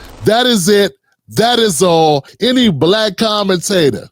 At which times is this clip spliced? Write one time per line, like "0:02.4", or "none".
0:02.3